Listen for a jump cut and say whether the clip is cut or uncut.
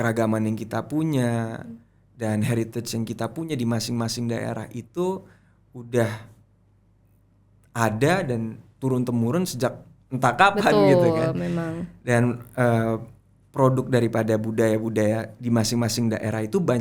uncut